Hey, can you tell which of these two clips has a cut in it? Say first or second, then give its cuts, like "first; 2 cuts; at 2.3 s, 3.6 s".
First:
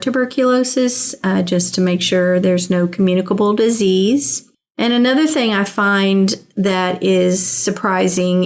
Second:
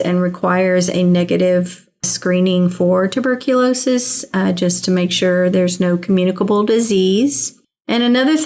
second; 1 cut; at 2.0 s